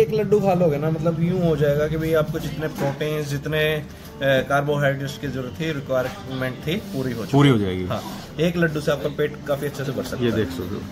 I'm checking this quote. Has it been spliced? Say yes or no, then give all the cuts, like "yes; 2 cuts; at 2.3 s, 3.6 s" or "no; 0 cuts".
no; 0 cuts